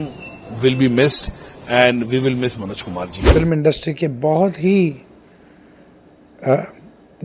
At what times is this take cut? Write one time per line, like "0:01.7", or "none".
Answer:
0:03.2